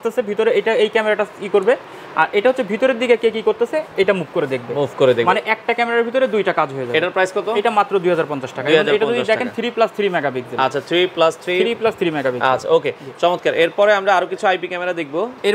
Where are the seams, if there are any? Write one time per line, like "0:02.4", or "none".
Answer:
none